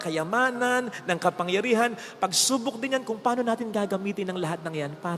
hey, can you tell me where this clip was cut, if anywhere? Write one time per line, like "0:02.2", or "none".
none